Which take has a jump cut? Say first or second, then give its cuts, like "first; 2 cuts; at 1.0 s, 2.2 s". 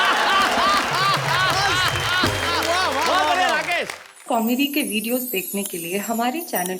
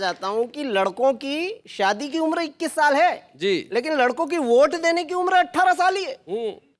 first; 1 cut; at 4.1 s